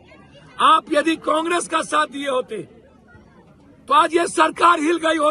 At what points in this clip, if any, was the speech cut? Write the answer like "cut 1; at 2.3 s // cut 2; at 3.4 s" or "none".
none